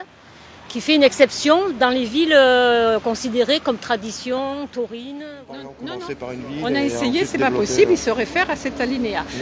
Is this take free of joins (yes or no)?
no